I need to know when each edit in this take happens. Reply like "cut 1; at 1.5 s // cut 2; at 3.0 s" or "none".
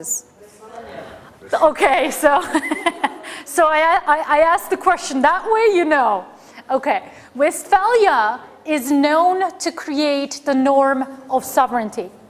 none